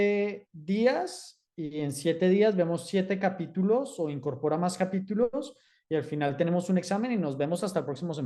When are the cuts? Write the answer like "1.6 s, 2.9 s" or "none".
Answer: none